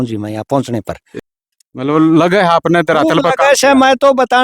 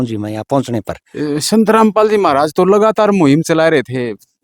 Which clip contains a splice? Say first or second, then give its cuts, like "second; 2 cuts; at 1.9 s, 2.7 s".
first; 1 cut; at 1.0 s